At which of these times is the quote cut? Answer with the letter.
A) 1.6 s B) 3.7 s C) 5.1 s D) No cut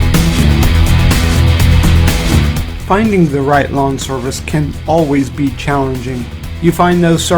C